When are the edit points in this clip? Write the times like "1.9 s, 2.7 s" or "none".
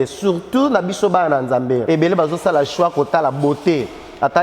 1.8 s